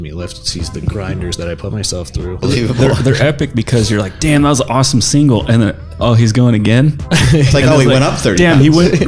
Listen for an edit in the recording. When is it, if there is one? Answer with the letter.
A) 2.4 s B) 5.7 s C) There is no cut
A